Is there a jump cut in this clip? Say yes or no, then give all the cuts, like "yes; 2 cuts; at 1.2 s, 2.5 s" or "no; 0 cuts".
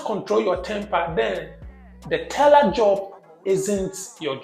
no; 0 cuts